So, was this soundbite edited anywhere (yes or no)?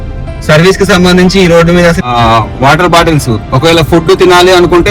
yes